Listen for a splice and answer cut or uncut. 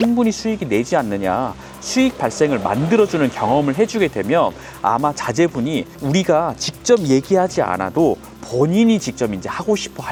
uncut